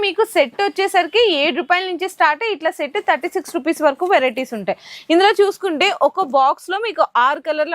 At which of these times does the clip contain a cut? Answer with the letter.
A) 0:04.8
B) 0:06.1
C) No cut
C